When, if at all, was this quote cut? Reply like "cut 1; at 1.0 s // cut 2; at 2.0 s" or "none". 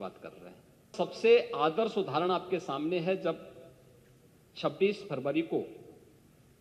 cut 1; at 0.9 s